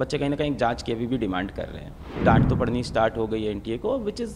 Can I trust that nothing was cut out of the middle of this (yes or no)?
no